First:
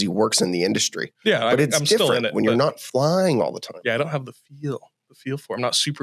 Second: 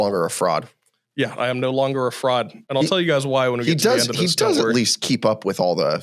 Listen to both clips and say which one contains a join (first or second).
second